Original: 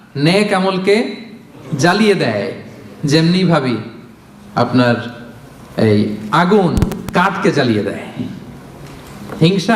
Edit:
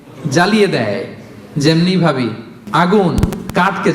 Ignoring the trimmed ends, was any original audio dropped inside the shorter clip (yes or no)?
yes